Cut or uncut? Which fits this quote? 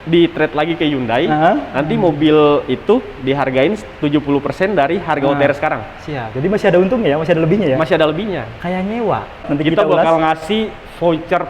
cut